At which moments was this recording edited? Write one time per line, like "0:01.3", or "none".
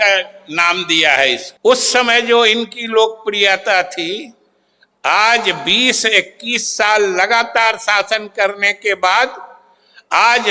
0:01.5